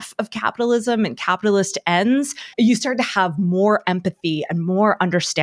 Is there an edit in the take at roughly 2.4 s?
yes; 1 cut; at 2.4 s

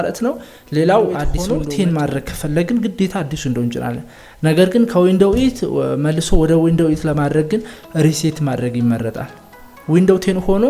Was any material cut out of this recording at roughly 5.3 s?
no; 1 cut; at 1.3 s

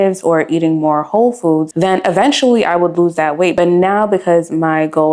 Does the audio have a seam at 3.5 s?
yes; 1 cut; at 3.5 s

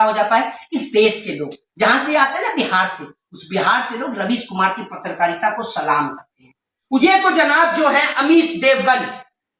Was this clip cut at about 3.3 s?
no; 1 cut; at 7.0 s

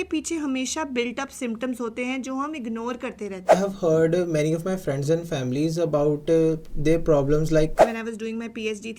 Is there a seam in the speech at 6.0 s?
no; 2 cuts; at 3.5 s, 7.7 s

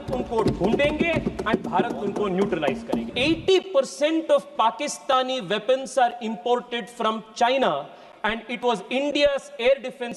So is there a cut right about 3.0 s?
yes; 1 cut; at 3.0 s

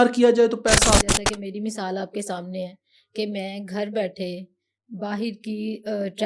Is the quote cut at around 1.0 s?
yes; 1 cut; at 1.0 s

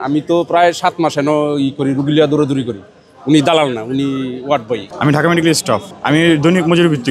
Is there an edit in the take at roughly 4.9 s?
yes; 2 cuts; at 4.9 s, 5.9 s

